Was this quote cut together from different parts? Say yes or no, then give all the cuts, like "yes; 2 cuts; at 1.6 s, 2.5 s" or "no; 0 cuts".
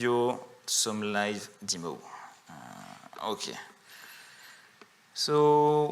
no; 0 cuts